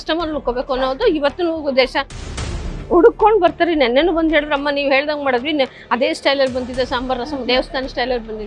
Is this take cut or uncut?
cut